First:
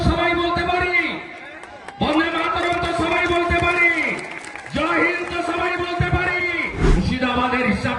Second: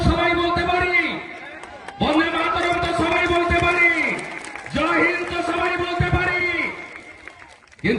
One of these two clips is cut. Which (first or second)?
first